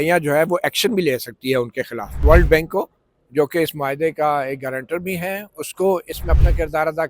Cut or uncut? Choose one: cut